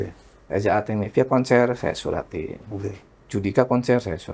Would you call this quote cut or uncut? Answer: cut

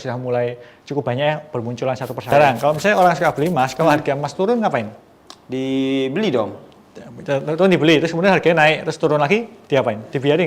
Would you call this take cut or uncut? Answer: cut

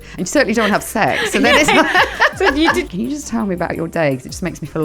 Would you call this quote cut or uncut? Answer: cut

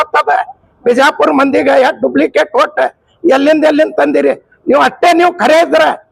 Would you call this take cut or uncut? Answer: uncut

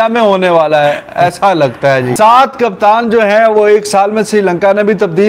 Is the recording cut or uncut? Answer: cut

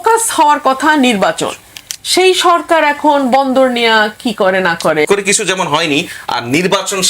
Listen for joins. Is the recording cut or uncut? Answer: cut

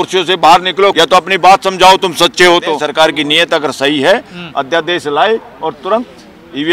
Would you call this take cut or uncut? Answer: cut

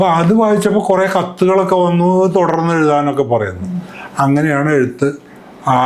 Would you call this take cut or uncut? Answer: uncut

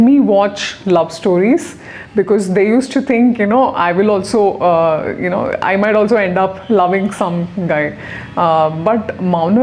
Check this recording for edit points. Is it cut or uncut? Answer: uncut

